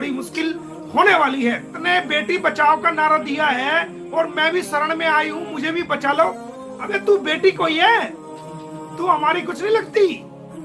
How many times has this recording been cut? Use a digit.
1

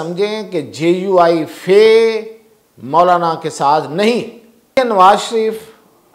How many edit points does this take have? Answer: 1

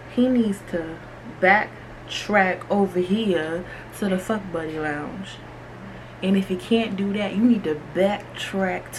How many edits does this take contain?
0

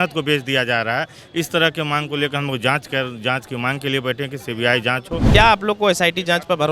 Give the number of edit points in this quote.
1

